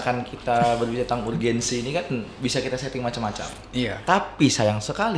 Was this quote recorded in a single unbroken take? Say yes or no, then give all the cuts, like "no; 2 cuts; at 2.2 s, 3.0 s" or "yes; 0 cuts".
no; 1 cut; at 4.0 s